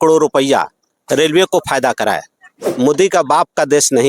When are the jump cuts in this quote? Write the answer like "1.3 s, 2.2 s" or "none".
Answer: 2.6 s